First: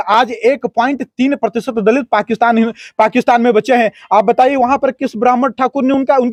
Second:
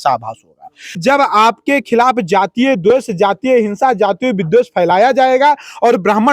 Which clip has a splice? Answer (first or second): second